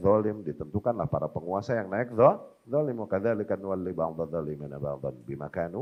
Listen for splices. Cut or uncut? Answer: uncut